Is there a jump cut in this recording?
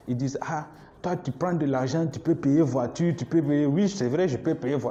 no; 0 cuts

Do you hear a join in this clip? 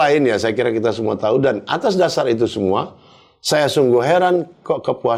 no; 0 cuts

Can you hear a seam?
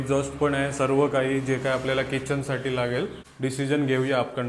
yes; 1 cut; at 3.2 s

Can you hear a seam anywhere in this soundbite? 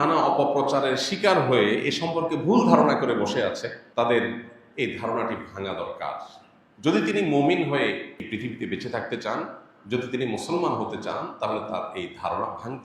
yes; 2 cuts; at 3.8 s, 8.2 s

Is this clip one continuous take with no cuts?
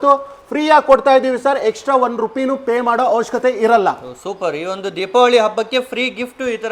yes; 0 cuts

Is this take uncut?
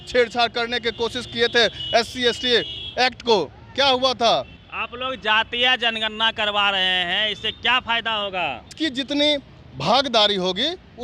no; 2 cuts; at 4.6 s, 8.7 s

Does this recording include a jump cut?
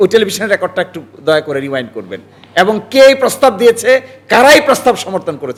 no; 0 cuts

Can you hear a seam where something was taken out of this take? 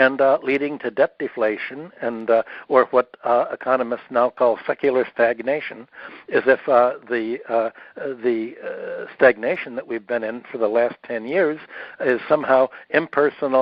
no; 0 cuts

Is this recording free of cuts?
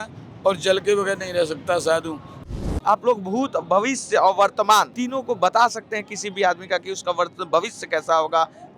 no; 2 cuts; at 2.5 s, 4.9 s

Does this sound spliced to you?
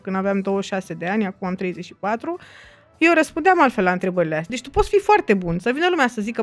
yes; 1 cut; at 4.6 s

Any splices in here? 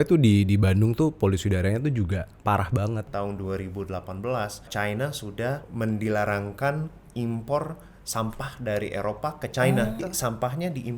yes; 4 cuts; at 3.1 s, 4.7 s, 5.7 s, 10.0 s

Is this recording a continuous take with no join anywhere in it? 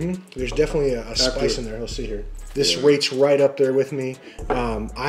no; 1 cut; at 2.5 s

